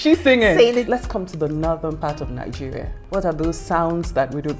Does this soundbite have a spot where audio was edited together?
yes; 2 cuts; at 0.9 s, 2.9 s

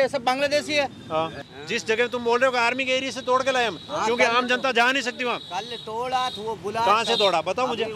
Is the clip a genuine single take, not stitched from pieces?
no; 1 cut; at 1.4 s

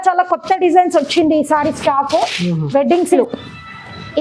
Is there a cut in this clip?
yes; 1 cut; at 3.1 s

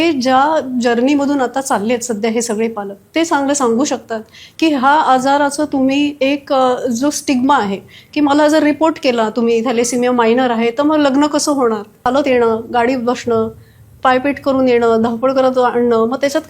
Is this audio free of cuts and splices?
no; 1 cut; at 12.1 s

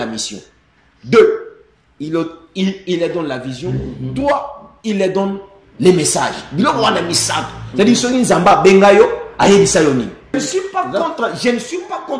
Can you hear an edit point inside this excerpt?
yes; 1 cut; at 10.4 s

